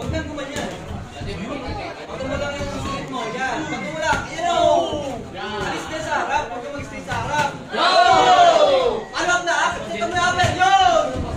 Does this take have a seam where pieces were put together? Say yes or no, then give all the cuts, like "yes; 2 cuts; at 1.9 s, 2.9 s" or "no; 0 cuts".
yes; 1 cut; at 2.1 s